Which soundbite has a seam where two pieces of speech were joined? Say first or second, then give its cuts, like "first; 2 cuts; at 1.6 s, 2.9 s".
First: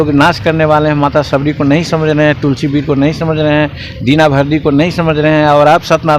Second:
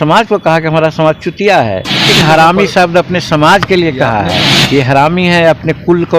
second; 2 cuts; at 2.1 s, 4.5 s